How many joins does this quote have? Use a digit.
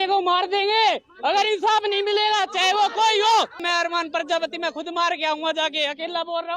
1